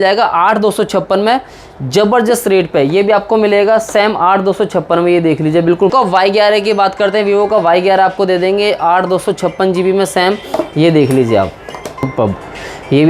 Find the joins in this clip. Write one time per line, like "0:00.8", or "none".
0:05.9
0:12.0